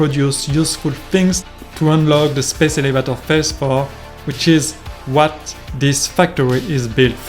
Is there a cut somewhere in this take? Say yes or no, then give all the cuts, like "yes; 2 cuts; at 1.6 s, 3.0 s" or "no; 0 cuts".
no; 0 cuts